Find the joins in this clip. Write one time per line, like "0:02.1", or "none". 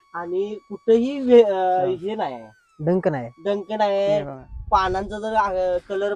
none

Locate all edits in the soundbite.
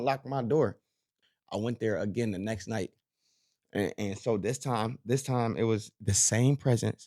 0:01.2

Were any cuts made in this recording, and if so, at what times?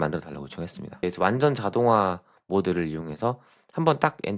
0:01.0

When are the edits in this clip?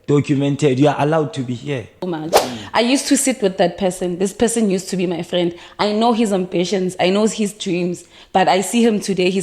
0:02.0

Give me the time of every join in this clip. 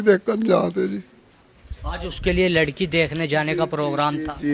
none

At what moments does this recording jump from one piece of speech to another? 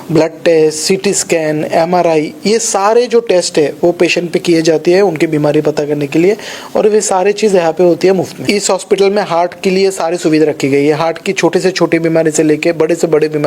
0:08.4

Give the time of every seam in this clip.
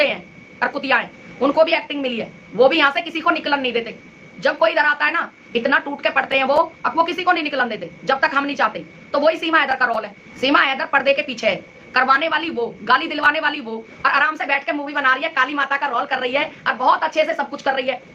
none

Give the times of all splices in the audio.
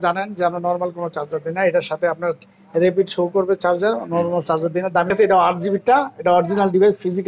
0:05.1

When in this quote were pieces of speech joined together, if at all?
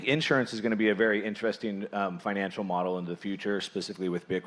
none

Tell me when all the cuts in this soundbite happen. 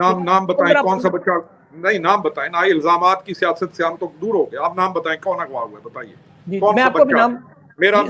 none

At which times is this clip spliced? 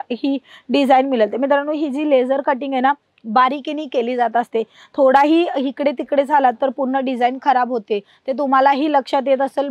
none

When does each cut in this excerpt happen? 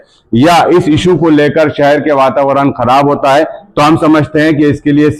none

